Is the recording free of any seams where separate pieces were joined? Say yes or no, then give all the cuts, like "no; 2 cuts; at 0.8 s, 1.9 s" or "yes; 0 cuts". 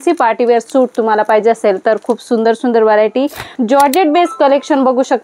no; 1 cut; at 3.5 s